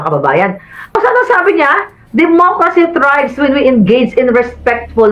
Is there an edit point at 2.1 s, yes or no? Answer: no